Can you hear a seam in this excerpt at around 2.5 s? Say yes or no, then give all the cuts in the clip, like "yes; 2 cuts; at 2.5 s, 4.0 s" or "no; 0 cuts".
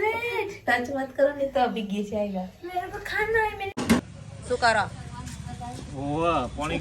no; 1 cut; at 3.8 s